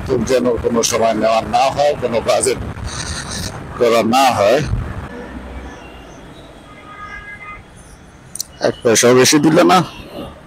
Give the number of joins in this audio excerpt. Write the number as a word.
one